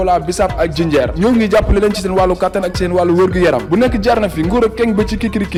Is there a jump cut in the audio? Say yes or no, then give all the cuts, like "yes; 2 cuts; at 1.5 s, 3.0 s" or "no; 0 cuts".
no; 0 cuts